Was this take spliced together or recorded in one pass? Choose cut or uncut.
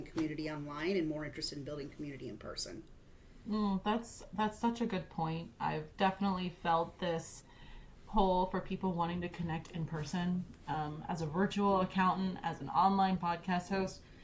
uncut